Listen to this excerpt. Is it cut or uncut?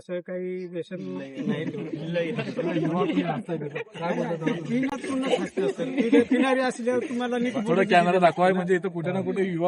uncut